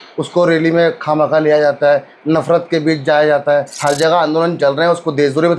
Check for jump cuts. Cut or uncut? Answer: cut